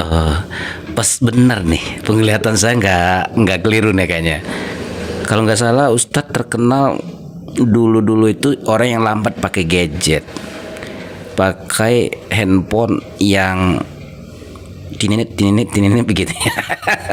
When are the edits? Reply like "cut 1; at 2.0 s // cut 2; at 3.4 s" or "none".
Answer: none